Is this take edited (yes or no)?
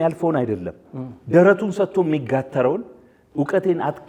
no